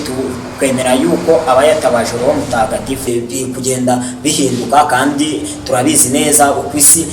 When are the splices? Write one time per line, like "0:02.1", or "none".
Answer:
0:03.1